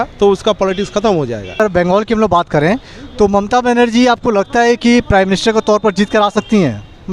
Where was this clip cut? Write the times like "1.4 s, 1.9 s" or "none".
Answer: 1.6 s